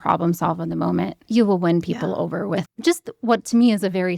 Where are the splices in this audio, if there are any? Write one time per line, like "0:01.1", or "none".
0:01.2
0:02.6